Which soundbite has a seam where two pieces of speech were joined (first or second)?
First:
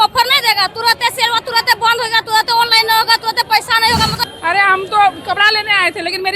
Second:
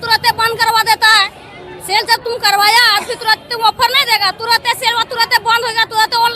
first